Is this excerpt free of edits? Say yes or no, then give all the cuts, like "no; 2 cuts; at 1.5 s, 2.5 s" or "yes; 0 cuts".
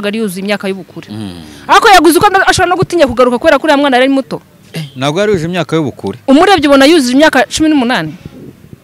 yes; 0 cuts